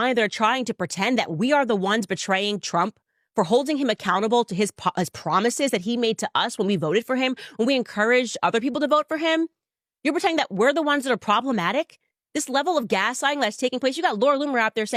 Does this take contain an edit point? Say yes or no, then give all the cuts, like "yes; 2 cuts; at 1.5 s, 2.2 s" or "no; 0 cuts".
no; 0 cuts